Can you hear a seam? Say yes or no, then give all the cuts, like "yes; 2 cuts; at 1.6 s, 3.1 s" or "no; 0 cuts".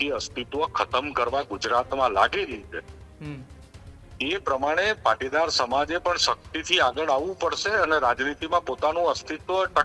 no; 0 cuts